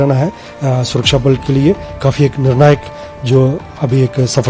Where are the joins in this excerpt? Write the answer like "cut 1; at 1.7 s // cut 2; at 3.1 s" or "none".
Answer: none